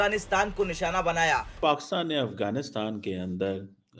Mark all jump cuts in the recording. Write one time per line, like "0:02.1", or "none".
0:01.5